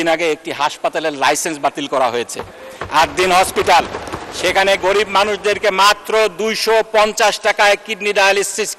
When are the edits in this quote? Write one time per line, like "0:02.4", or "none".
none